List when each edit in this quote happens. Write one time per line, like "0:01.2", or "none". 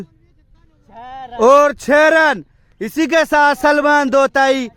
none

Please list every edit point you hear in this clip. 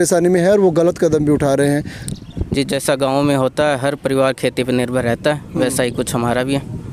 none

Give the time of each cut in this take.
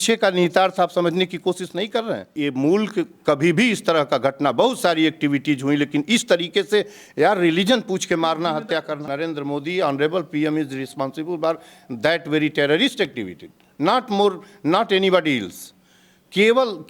0:02.3
0:09.1

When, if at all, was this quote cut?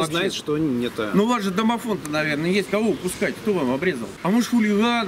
0:04.1

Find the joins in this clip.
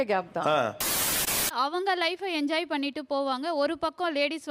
0:01.1

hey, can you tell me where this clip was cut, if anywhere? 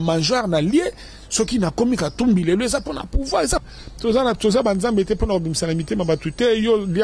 0:03.8

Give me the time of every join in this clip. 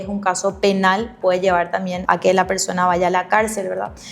0:01.2
0:02.0

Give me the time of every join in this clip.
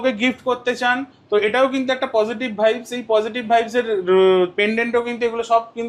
none

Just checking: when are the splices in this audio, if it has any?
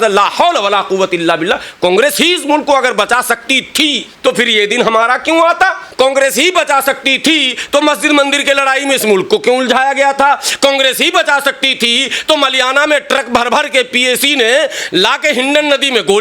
0:04.1
0:05.8

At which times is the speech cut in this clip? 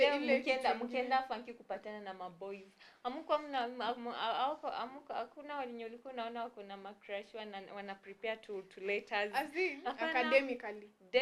0:09.8

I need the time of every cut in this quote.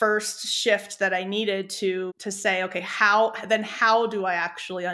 0:02.2

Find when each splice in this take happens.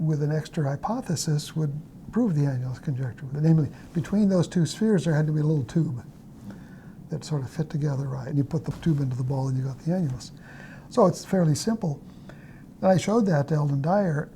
0:03.2
0:08.5

